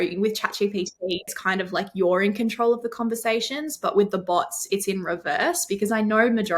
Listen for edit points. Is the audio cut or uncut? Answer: cut